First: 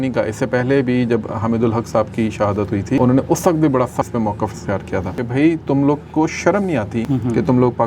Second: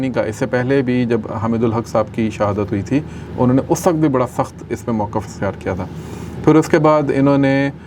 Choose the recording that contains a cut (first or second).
first